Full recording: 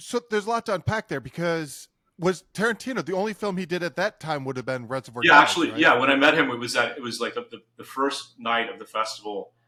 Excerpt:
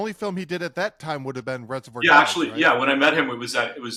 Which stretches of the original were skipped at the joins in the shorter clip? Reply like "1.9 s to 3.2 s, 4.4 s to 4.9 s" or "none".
none

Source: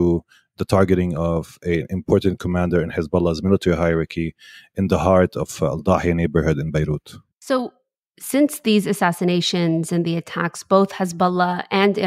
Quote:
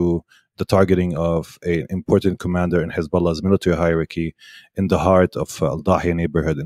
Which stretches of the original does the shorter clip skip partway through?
none

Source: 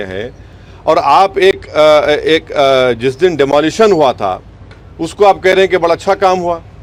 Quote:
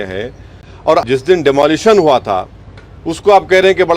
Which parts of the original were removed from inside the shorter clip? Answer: 1.0 s to 3.0 s

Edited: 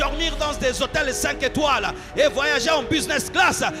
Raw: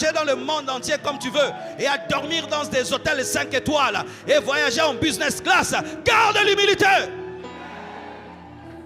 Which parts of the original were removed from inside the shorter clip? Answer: none

